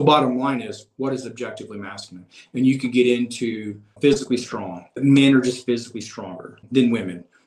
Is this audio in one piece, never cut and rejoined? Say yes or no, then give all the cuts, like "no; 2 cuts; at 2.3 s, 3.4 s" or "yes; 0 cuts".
no; 3 cuts; at 3.9 s, 4.9 s, 6.6 s